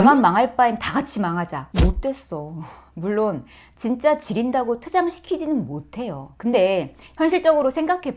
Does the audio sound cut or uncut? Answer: uncut